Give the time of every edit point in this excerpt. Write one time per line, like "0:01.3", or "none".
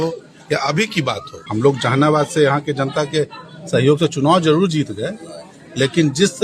0:01.3